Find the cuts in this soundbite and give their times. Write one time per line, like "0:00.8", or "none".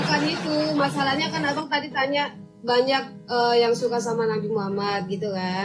none